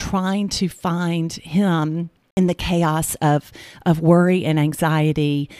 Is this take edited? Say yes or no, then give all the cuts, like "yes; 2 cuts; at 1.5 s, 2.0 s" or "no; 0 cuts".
yes; 1 cut; at 2.2 s